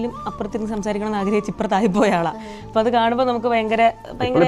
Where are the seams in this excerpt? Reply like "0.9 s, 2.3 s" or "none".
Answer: none